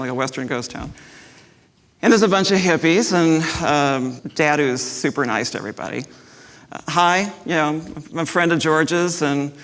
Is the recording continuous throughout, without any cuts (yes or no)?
no